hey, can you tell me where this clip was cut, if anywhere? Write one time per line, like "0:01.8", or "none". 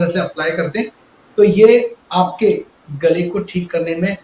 0:02.0